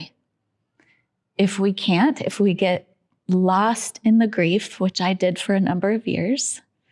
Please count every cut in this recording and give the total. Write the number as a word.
zero